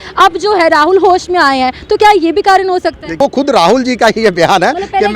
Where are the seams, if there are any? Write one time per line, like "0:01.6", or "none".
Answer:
0:03.2